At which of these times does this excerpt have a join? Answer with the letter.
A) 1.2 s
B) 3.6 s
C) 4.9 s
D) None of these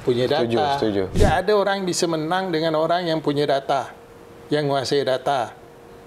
A